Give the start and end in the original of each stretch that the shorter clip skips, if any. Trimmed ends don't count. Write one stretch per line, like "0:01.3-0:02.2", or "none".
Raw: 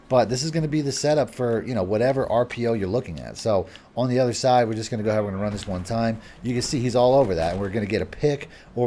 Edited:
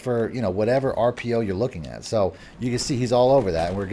0:03.8-0:06.3